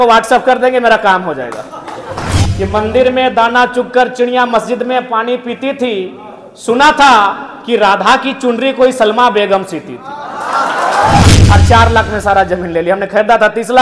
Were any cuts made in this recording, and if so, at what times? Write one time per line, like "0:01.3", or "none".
0:02.4
0:11.2